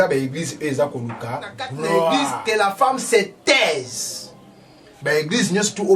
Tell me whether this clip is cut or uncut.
cut